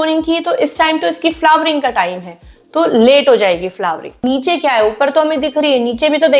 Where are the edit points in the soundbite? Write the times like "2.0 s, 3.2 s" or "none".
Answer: 4.2 s